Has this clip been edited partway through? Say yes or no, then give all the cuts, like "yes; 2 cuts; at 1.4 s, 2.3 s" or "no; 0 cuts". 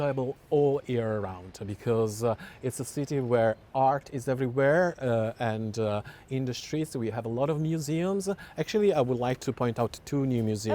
no; 0 cuts